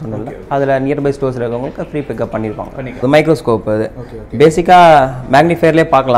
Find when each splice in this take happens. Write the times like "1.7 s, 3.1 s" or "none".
3.0 s